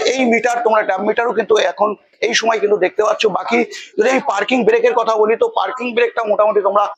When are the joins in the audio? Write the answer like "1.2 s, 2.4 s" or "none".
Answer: none